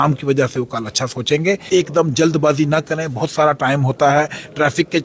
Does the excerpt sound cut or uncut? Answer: cut